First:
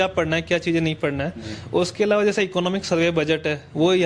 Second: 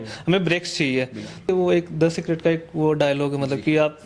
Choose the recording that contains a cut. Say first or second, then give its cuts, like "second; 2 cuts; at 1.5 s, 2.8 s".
second; 1 cut; at 1.5 s